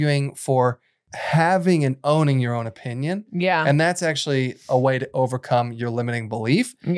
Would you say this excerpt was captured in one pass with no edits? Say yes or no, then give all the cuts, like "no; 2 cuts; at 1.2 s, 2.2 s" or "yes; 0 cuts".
no; 1 cut; at 1.1 s